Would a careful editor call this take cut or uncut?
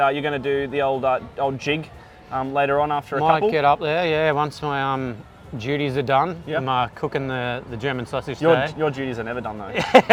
uncut